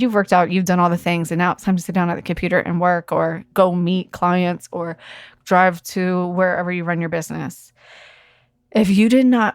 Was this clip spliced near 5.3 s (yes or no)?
yes